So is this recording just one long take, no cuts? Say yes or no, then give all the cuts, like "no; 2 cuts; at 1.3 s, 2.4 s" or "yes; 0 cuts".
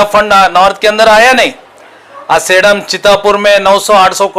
yes; 0 cuts